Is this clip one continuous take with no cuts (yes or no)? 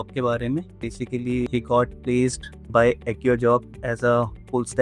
no